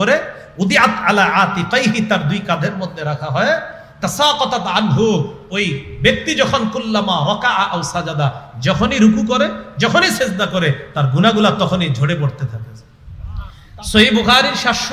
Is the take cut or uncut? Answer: cut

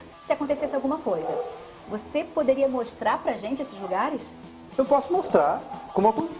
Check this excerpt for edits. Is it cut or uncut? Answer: cut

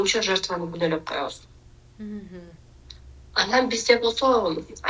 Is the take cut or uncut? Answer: uncut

